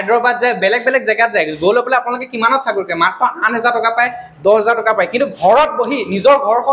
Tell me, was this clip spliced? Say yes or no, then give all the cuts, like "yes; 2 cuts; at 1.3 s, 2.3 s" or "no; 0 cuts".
no; 0 cuts